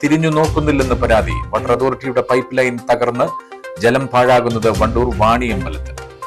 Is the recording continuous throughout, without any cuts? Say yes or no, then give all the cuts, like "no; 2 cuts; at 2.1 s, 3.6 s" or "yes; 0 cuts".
yes; 0 cuts